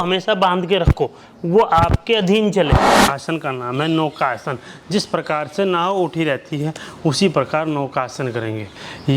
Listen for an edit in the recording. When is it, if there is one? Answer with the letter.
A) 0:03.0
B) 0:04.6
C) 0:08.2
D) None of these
A